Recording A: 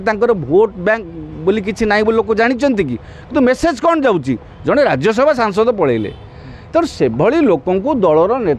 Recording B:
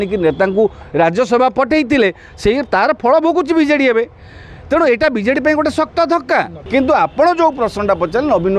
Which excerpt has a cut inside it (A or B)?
B